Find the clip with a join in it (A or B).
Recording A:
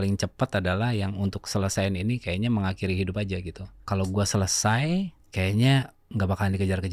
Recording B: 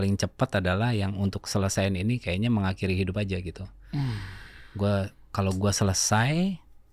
A